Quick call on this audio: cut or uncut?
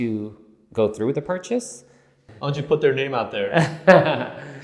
cut